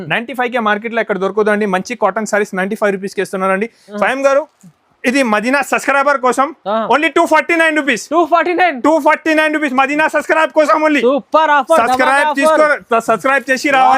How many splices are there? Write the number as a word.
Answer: one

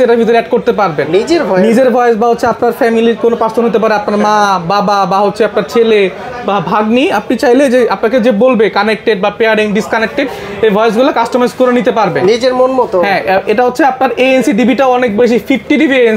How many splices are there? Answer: zero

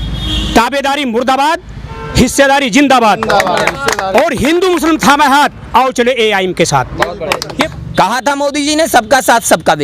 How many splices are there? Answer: one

